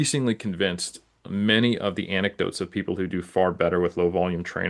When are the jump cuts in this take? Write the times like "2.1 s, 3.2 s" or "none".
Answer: none

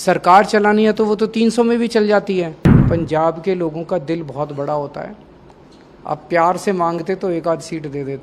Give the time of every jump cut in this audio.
2.7 s

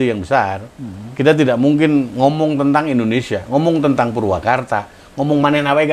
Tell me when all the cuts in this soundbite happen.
none

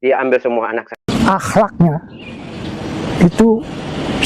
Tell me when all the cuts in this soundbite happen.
1.1 s

